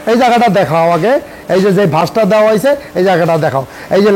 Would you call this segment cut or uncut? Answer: uncut